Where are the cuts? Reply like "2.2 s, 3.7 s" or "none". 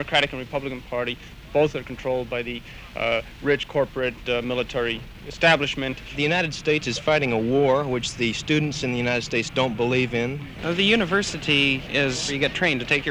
6.2 s, 10.5 s, 12.3 s